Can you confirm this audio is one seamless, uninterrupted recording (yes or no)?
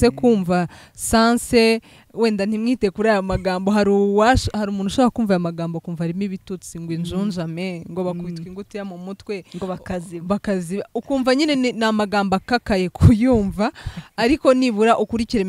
yes